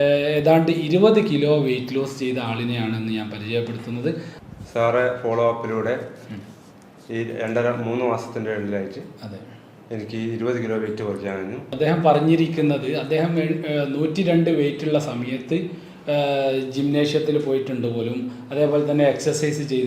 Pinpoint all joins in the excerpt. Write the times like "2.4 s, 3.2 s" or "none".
4.3 s, 11.6 s